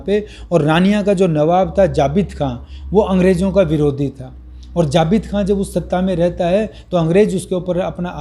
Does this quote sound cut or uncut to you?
uncut